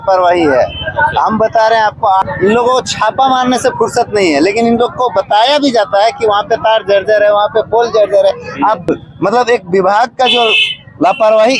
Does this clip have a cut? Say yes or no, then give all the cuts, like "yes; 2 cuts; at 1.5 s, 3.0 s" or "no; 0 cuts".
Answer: yes; 2 cuts; at 2.2 s, 8.8 s